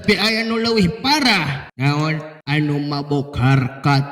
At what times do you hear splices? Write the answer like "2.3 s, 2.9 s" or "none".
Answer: 1.6 s, 2.3 s